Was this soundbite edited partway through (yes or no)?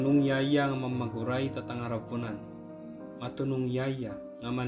no